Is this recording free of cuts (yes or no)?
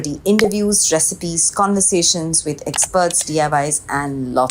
yes